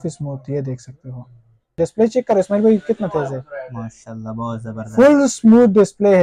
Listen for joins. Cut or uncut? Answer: cut